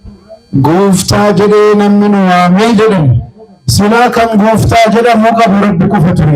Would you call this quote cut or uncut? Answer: uncut